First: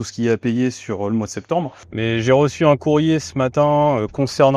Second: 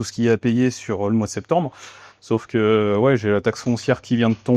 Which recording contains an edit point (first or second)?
first